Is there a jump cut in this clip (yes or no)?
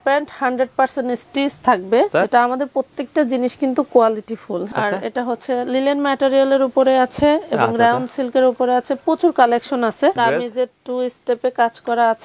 yes